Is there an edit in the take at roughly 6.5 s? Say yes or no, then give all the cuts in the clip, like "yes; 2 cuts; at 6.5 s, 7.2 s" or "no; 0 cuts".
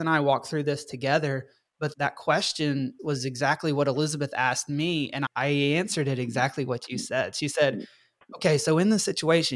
no; 2 cuts; at 1.9 s, 5.2 s